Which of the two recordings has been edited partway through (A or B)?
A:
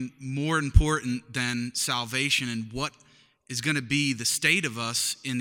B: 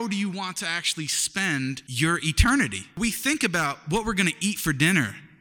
B